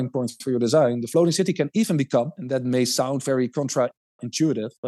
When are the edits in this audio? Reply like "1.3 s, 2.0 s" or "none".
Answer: none